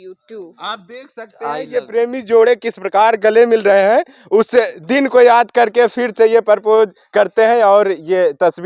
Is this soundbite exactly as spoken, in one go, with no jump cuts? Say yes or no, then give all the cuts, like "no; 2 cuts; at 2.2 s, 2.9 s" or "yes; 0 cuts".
yes; 0 cuts